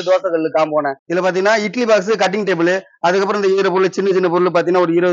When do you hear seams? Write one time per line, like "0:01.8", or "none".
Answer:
0:01.0

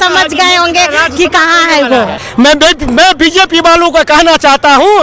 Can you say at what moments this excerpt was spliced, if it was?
0:02.2

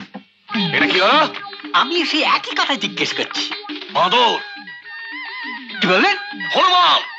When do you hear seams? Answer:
none

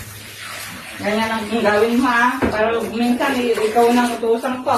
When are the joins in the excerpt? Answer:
none

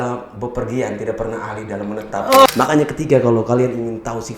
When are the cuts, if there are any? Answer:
0:02.5

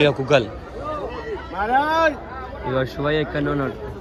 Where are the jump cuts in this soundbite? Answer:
none

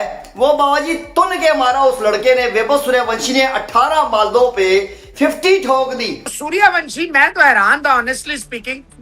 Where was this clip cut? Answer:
0:06.2

